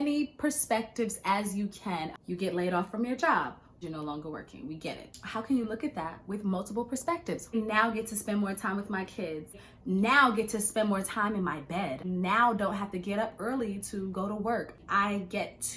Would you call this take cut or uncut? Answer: cut